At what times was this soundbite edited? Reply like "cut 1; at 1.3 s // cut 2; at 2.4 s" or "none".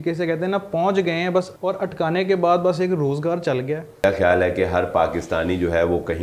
cut 1; at 1.5 s // cut 2; at 4.0 s